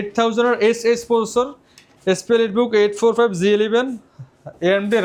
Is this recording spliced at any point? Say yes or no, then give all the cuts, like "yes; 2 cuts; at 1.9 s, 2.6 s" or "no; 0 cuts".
no; 0 cuts